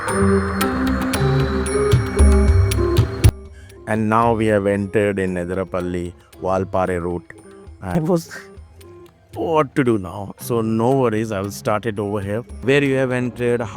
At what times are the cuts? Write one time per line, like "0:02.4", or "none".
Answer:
0:03.3
0:07.9
0:12.6

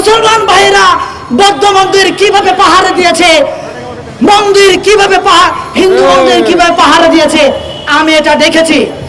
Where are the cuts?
none

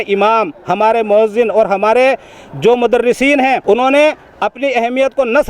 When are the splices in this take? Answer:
0:03.6

